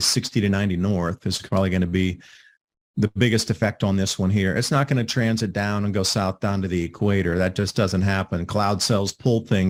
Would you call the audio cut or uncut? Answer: uncut